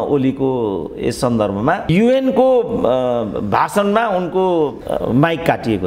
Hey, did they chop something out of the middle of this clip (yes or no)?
no